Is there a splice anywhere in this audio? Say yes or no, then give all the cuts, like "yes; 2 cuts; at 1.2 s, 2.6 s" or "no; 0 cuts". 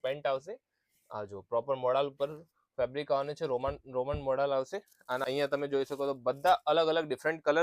yes; 1 cut; at 5.2 s